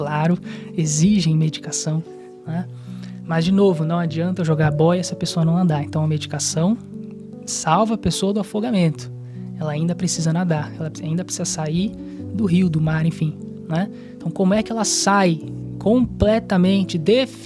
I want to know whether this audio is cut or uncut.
uncut